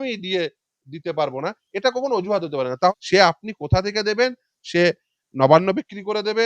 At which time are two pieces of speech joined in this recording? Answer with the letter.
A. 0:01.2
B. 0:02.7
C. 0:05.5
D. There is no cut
B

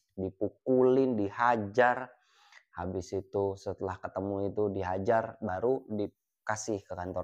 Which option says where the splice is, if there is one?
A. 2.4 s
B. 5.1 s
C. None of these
C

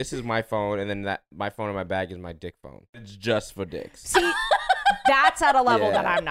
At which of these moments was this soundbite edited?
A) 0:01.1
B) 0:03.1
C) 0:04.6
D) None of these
B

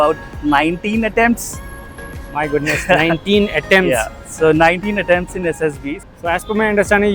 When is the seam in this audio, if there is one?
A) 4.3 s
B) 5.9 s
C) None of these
B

